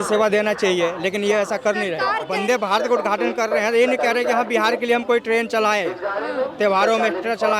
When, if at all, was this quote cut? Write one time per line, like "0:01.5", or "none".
0:02.2